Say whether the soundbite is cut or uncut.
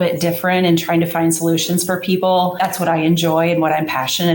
cut